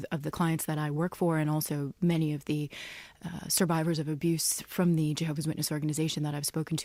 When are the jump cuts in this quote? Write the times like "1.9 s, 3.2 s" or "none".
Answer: none